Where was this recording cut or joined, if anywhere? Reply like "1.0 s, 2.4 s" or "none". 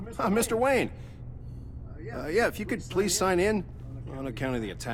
none